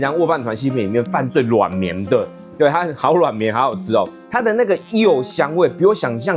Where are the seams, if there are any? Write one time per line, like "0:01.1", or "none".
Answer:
0:04.2